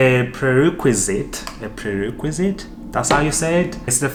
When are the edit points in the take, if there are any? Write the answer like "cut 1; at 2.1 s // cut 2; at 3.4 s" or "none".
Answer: none